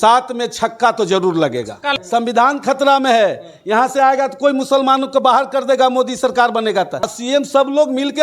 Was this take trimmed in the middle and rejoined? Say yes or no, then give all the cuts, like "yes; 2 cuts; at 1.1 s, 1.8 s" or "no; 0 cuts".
yes; 2 cuts; at 2.0 s, 7.1 s